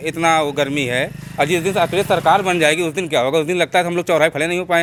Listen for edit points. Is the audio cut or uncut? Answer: uncut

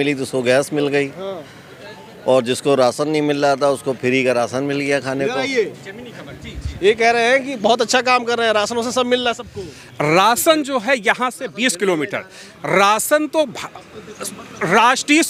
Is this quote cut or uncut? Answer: uncut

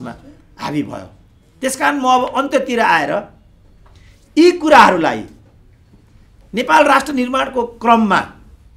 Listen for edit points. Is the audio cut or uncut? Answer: uncut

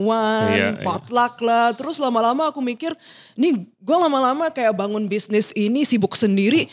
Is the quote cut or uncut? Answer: uncut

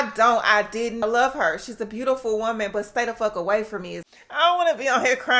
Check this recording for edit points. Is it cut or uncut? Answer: cut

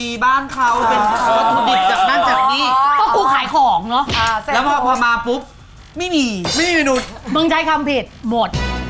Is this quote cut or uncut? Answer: uncut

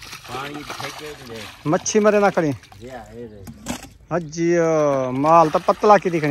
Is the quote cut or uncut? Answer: uncut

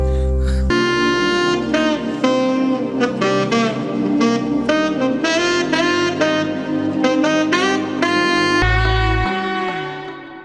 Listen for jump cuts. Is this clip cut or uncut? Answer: cut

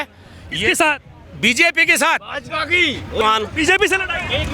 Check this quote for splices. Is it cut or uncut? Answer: cut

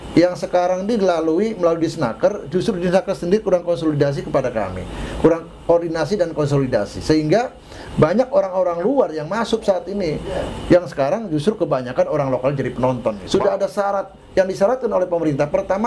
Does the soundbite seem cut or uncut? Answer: cut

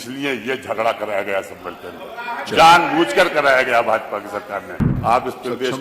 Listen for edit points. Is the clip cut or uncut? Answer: cut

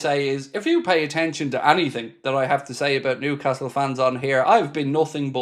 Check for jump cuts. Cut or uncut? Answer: uncut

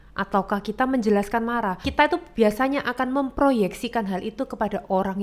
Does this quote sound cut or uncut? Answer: cut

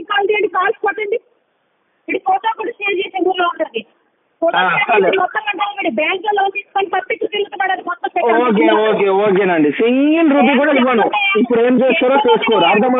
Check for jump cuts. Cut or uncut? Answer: uncut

